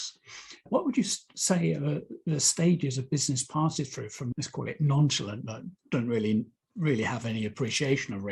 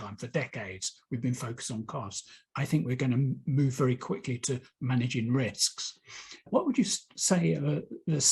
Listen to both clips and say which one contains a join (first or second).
first